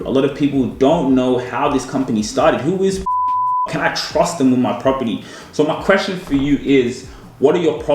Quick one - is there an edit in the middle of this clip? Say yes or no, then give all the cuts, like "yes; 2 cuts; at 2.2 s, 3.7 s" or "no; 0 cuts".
no; 0 cuts